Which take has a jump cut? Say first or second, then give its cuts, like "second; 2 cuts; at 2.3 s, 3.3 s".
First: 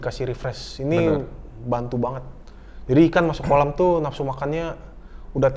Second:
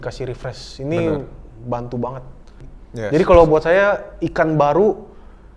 second; 1 cut; at 2.7 s